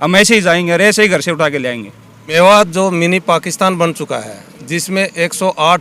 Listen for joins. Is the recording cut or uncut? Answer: cut